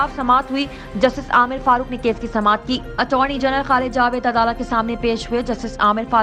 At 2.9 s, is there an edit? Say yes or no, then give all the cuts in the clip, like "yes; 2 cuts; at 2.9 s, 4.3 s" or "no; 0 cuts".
no; 0 cuts